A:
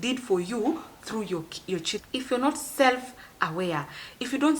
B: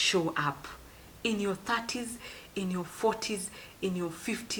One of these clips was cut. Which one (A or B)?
A